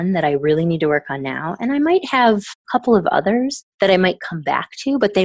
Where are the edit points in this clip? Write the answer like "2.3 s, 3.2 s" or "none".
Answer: 2.5 s, 3.6 s